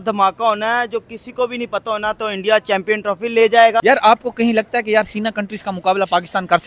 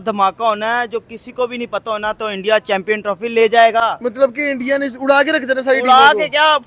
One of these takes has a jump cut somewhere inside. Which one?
first; 1 cut; at 3.8 s

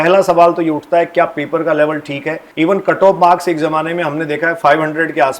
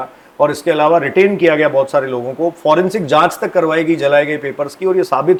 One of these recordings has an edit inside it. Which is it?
first; 1 cut; at 2.4 s

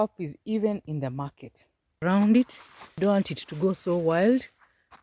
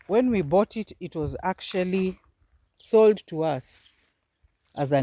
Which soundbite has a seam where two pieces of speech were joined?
first; 2 cuts; at 2.0 s, 3.0 s

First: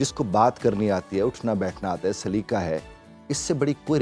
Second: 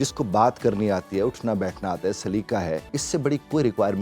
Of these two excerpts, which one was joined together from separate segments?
second; 1 cut; at 2.9 s

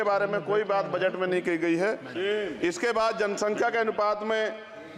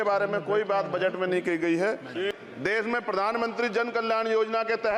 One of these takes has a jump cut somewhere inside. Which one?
second; 1 cut; at 2.3 s

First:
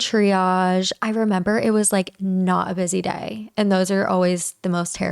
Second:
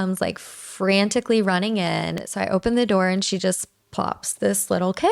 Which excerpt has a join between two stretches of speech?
second; 1 cut; at 2.2 s

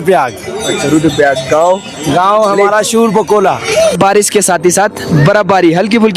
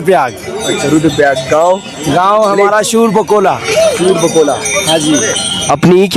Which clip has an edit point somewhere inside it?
first; 1 cut; at 4.0 s

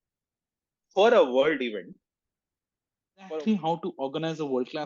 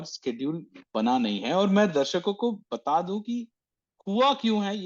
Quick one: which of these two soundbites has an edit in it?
first; 1 cut; at 3.3 s

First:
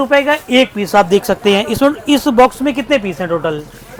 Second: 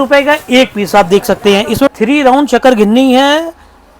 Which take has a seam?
second; 1 cut; at 1.9 s

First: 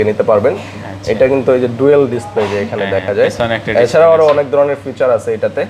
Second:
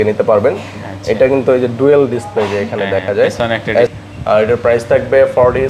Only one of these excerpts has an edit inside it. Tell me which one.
second; 1 cut; at 3.9 s

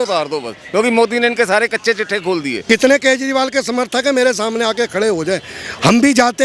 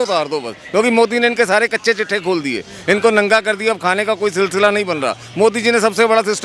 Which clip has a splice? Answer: first; 1 cut; at 2.5 s

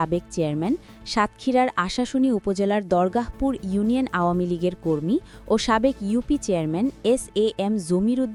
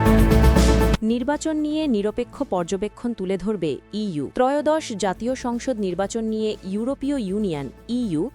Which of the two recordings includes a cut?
second; 2 cuts; at 1.0 s, 4.3 s

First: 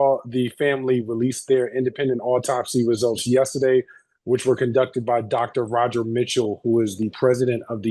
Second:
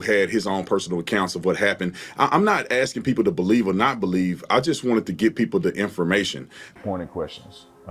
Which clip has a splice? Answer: second; 1 cut; at 6.7 s

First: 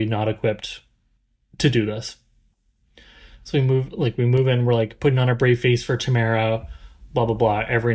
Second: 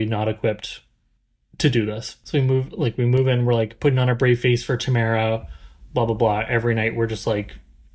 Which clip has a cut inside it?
second; 1 cut; at 2.1 s

